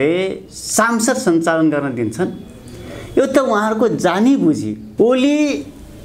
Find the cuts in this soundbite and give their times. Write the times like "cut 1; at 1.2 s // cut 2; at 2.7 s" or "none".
cut 1; at 4.8 s

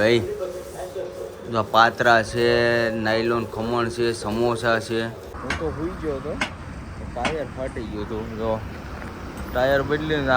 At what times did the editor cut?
cut 1; at 5.3 s

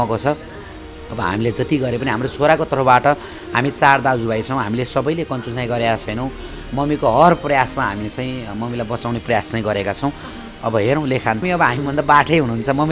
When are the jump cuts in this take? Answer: cut 1; at 11.4 s

